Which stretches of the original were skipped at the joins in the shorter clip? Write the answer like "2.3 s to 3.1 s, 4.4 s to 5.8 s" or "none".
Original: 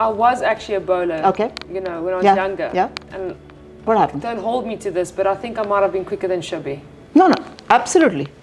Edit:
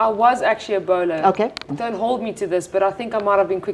1.7 s to 4.2 s